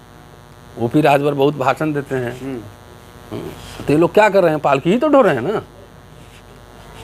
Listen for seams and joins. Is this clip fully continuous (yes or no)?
yes